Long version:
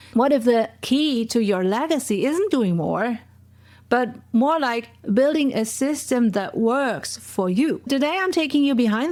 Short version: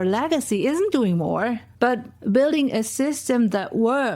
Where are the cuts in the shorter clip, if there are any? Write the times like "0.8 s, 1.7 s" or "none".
2.1 s

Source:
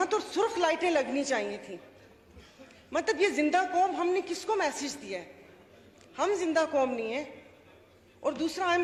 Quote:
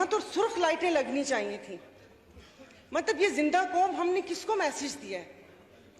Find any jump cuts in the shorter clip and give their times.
none

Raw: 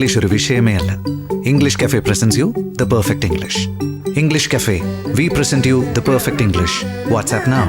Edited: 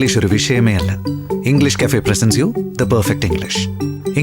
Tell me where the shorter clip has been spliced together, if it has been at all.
none

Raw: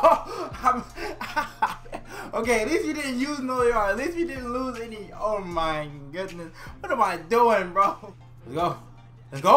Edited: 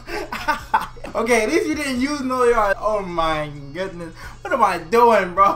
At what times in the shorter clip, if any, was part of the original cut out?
1.0 s, 2.8 s

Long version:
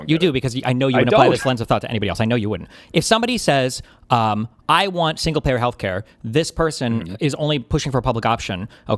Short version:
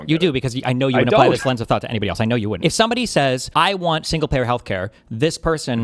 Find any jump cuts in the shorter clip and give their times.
2.5 s, 3.5 s

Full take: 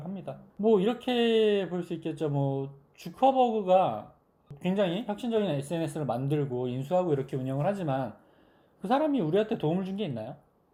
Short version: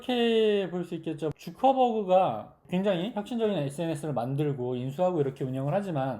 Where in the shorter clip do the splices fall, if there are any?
1.3 s, 2.5 s

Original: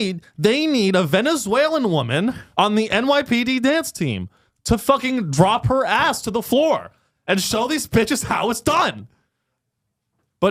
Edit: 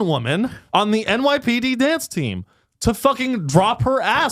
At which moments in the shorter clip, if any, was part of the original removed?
none

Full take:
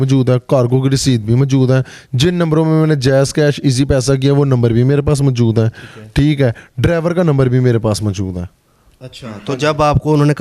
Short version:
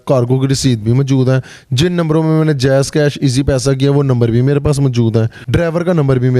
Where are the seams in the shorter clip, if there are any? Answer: 5.4 s

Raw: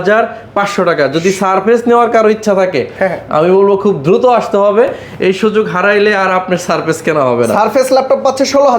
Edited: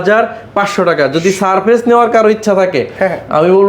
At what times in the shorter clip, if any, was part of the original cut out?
none

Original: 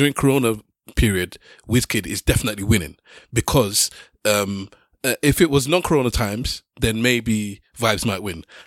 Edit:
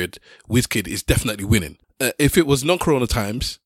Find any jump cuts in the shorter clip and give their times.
1.8 s

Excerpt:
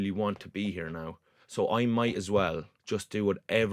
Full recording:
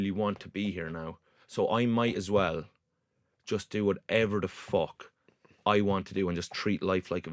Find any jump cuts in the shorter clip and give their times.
2.7 s

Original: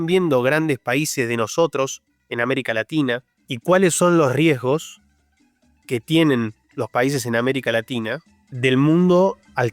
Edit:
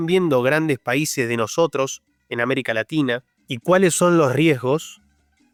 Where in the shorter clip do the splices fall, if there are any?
none

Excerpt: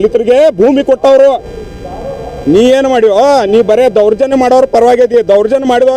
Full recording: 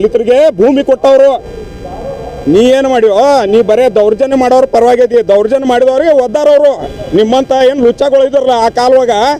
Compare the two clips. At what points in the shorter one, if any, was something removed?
none

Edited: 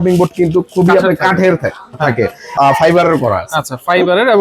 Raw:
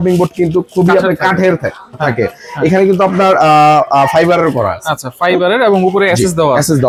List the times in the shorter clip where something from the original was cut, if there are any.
2.5 s

